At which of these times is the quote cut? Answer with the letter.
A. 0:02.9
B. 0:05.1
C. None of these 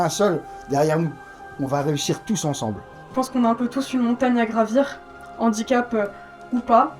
A